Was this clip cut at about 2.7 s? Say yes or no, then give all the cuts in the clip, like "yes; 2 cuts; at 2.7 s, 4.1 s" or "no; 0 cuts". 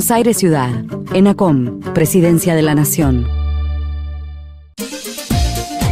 no; 1 cut; at 4.8 s